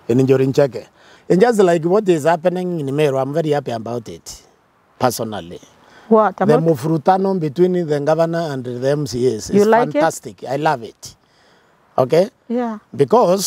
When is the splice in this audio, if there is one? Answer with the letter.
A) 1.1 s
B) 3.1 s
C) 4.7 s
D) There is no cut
A